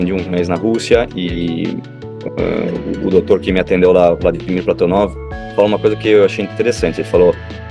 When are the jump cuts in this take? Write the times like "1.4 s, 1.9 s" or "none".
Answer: none